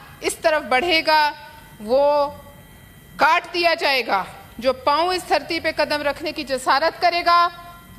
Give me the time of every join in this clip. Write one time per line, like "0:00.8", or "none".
none